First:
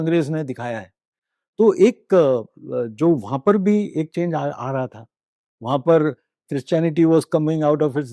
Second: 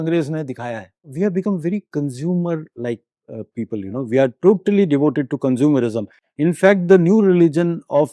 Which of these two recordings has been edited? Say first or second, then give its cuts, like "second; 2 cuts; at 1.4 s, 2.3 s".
second; 1 cut; at 1.1 s